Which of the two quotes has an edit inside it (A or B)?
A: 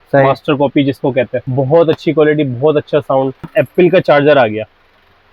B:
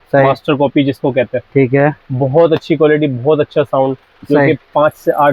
A